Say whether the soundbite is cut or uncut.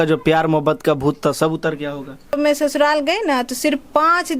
cut